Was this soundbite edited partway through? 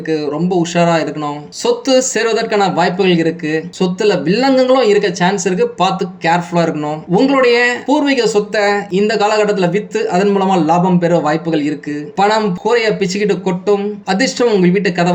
yes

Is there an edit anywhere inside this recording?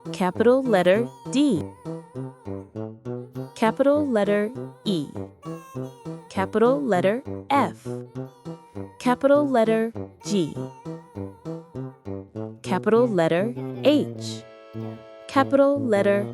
yes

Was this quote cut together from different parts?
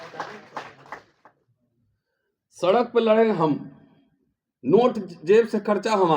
yes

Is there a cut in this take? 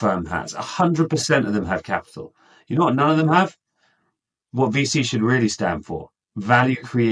no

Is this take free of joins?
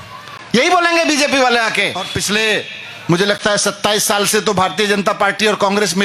no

